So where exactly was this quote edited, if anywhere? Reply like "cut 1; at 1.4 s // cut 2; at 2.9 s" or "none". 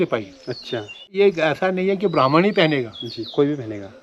cut 1; at 1.1 s